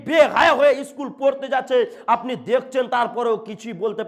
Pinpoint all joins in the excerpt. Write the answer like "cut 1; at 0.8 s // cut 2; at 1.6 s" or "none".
none

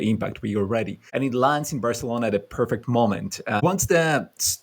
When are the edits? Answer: cut 1; at 1.0 s // cut 2; at 3.6 s

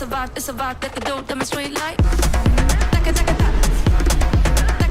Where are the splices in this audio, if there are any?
none

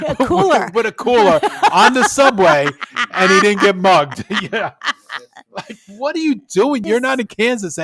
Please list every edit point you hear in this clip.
cut 1; at 6.8 s

